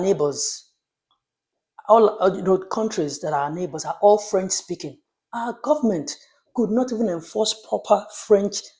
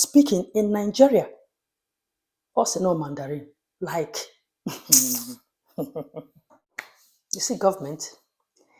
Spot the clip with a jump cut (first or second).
second